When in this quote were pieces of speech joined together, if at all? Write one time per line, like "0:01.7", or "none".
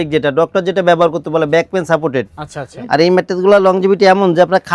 0:02.7